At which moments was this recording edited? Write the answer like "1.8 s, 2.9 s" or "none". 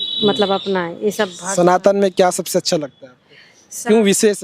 none